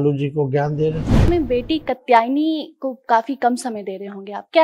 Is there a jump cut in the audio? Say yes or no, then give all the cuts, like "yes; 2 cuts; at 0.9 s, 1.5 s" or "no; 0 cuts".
yes; 1 cut; at 1.3 s